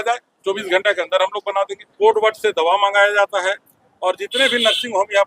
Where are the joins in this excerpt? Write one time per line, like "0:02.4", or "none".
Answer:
0:01.8